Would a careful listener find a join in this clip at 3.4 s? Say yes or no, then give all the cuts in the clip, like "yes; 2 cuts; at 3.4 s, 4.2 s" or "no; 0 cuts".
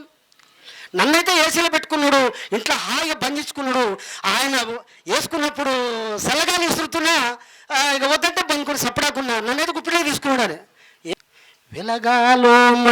no; 1 cut; at 11.1 s